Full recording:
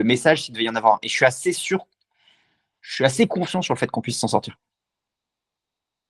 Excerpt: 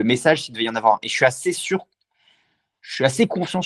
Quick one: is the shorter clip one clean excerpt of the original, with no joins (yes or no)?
yes